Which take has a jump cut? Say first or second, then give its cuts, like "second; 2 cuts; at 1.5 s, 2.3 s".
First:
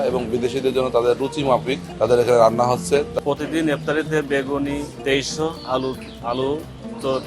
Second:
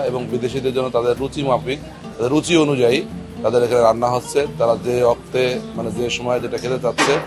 first; 3 cuts; at 1.8 s, 3.1 s, 4.9 s